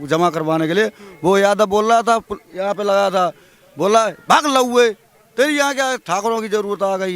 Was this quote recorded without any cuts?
yes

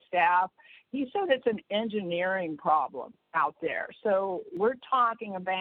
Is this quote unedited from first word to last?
no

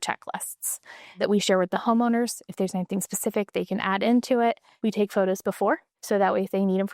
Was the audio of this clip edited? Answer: yes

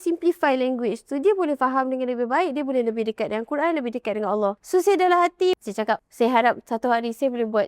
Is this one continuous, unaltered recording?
no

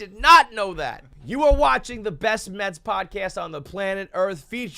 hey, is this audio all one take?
no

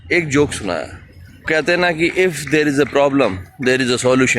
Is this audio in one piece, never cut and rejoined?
no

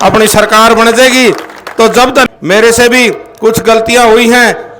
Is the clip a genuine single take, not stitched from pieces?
no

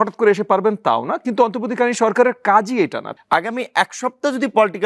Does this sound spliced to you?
yes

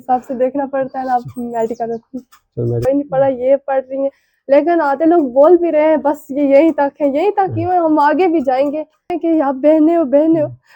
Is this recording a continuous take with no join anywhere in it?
no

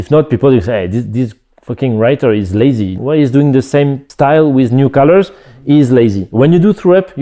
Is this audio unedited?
no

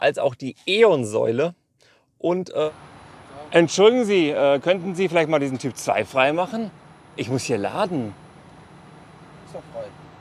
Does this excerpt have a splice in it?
yes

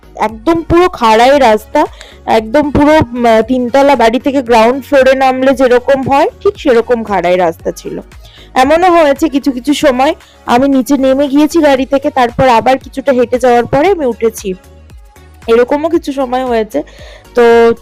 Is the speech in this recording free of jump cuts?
yes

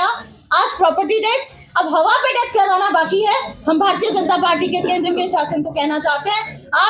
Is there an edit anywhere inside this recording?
no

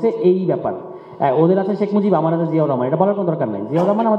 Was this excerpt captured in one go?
yes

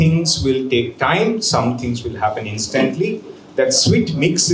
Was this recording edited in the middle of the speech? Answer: no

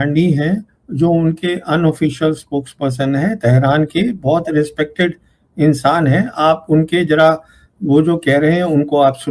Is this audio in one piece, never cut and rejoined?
yes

